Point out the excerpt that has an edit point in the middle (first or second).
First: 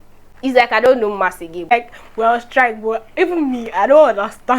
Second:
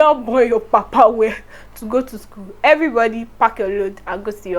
first